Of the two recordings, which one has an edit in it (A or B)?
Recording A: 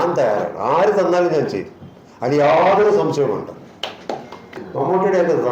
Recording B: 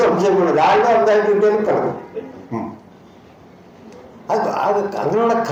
A